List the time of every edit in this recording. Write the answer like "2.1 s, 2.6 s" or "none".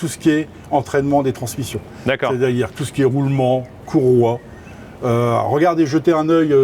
none